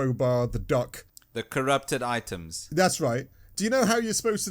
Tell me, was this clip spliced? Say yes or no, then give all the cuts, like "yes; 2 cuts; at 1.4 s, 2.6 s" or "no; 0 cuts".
yes; 1 cut; at 1.5 s